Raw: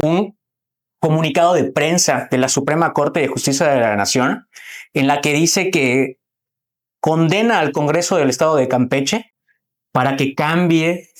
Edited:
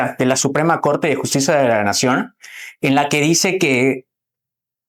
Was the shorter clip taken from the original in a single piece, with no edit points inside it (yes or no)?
yes